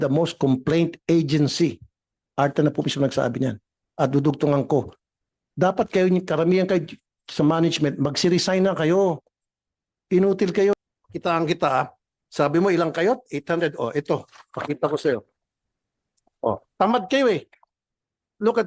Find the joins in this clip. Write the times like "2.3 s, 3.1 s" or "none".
10.7 s